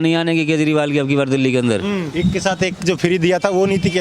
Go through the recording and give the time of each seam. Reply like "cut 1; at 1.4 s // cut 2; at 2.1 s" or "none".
cut 1; at 2.1 s

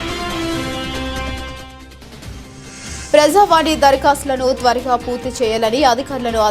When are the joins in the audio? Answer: cut 1; at 2.5 s

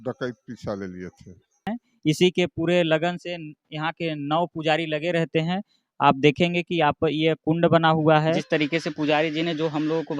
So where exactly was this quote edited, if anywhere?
cut 1; at 1.7 s // cut 2; at 8.4 s

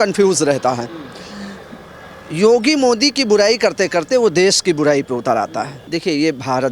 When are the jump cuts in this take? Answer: cut 1; at 5.8 s

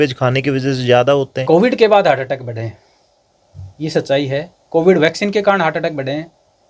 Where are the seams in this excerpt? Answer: cut 1; at 1.4 s

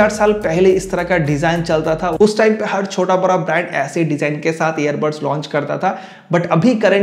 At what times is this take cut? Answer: none

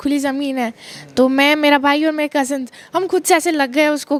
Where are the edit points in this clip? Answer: none

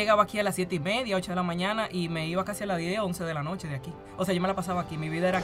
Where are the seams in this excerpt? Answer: cut 1; at 4.0 s

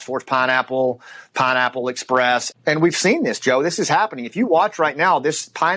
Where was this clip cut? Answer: cut 1; at 2.5 s

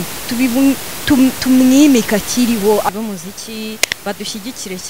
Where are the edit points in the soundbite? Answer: cut 1; at 2.9 s

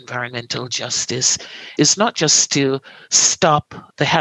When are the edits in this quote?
cut 1; at 1.7 s

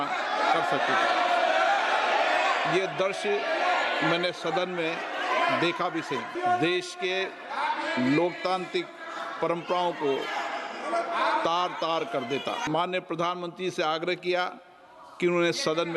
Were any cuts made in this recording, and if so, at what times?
cut 1; at 6.3 s // cut 2; at 12.6 s

